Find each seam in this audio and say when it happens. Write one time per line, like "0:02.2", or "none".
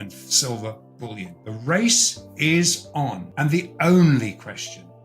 0:01.4
0:03.2